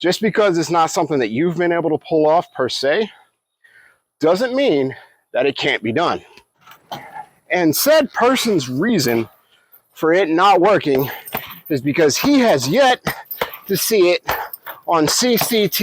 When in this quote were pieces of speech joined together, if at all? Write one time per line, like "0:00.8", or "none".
0:06.7

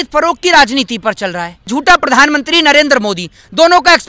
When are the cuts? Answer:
0:01.7

